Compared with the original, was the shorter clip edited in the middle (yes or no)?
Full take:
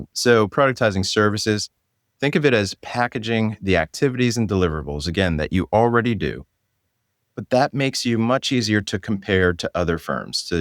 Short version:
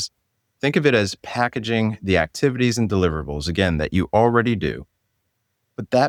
no